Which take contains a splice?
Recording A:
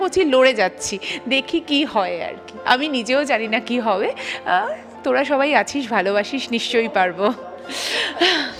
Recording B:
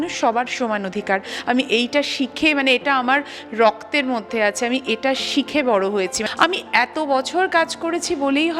B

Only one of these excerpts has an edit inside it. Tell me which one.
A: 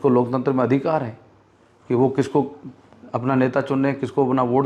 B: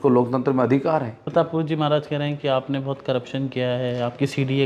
B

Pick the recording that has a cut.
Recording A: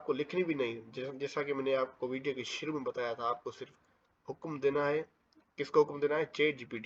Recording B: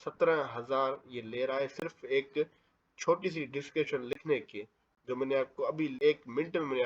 B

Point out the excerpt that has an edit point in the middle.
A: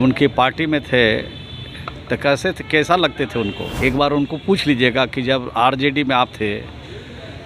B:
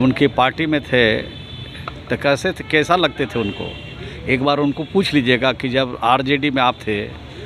A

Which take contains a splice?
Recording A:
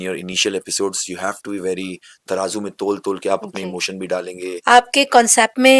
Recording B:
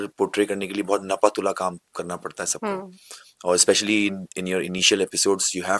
A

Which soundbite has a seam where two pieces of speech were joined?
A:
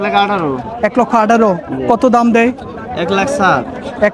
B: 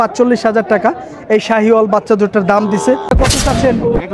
B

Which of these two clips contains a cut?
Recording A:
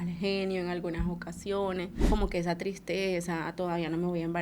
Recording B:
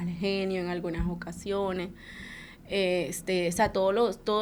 A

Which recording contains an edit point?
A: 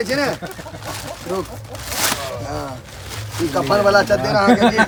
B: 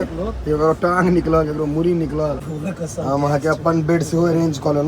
B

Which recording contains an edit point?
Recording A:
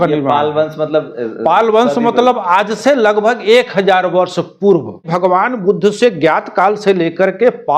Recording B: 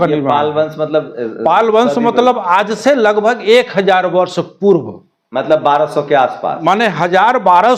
A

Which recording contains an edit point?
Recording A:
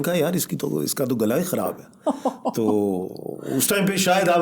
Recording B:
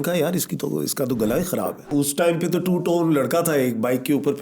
B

